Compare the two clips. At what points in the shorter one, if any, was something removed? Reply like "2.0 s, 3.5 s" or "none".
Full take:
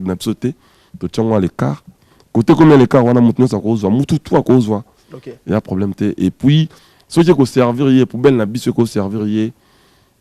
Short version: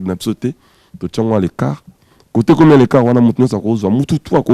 none